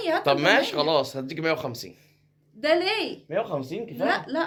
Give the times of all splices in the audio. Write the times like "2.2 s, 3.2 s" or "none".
none